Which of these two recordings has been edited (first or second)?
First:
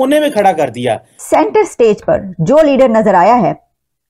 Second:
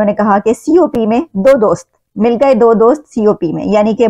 first